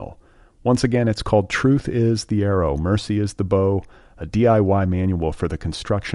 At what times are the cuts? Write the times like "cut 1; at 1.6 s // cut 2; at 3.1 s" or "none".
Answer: none